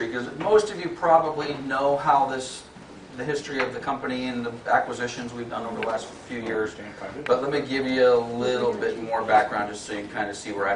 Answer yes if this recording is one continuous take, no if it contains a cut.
no